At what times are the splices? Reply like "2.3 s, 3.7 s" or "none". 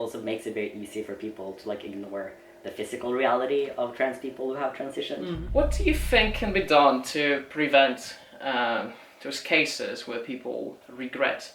5.4 s